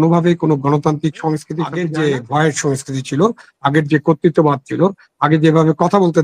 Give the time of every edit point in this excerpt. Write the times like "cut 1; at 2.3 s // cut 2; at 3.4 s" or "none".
cut 1; at 1.7 s